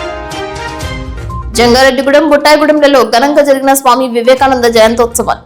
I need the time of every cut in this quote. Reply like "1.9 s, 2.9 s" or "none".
1.5 s